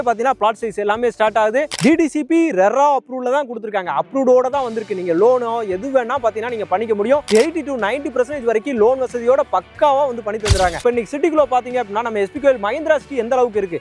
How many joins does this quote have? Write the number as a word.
one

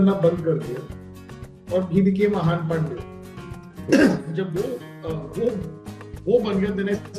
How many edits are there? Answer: zero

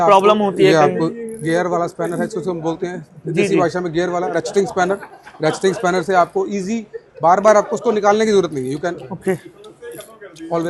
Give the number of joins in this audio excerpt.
zero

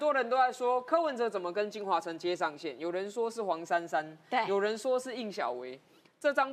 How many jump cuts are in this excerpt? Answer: zero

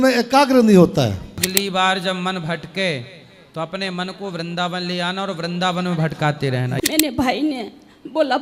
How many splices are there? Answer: two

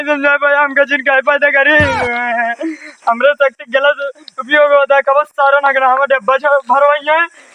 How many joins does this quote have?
zero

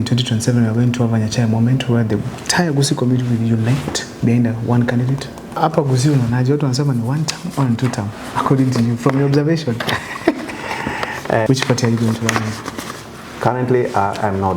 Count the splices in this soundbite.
two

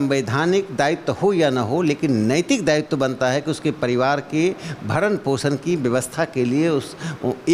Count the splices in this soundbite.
zero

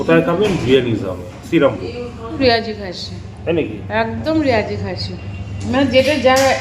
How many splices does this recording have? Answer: one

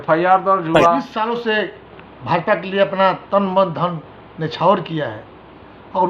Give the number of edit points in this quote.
one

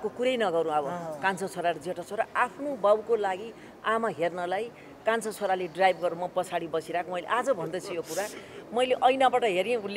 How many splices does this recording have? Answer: zero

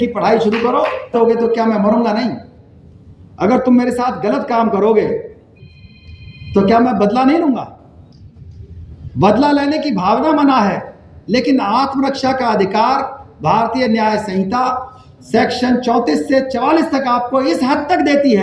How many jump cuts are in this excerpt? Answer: one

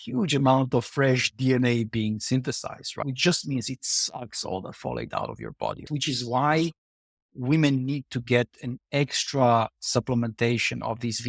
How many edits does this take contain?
two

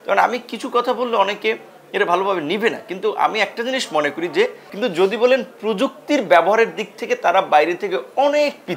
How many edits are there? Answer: one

